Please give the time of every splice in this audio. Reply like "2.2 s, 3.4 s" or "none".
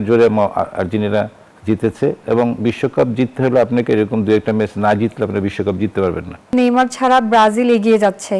1.5 s, 6.5 s